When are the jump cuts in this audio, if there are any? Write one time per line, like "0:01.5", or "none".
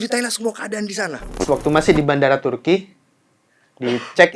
0:01.4